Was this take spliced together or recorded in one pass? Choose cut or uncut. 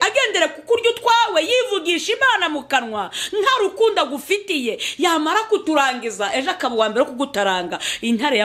uncut